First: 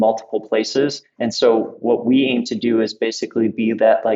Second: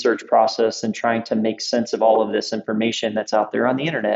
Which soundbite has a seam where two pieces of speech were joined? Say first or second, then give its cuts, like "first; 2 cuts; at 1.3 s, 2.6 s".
first; 1 cut; at 1.1 s